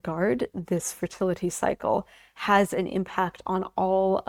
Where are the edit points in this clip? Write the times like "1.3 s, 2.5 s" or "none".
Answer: none

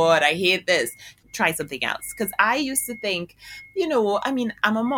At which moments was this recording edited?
1.2 s

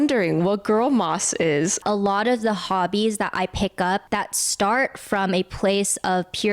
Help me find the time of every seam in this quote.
1.8 s, 4.0 s

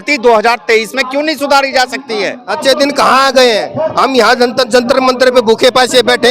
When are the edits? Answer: 2.4 s

